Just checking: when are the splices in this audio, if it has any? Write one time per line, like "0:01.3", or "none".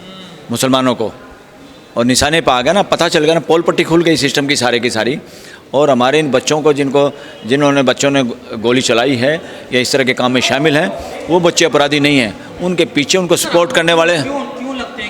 none